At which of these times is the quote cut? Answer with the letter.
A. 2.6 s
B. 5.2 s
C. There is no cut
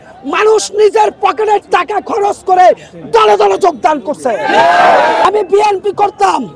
B